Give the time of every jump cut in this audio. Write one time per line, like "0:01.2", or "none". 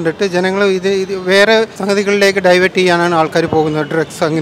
0:01.8